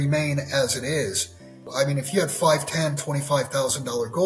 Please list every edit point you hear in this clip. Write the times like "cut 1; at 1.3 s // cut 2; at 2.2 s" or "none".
cut 1; at 1.7 s